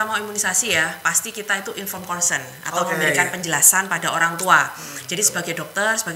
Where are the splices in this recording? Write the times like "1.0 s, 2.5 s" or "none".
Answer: none